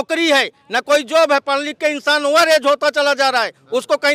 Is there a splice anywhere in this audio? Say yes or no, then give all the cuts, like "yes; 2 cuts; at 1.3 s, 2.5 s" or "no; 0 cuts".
no; 0 cuts